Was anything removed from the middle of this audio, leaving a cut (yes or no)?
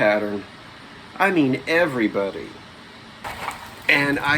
yes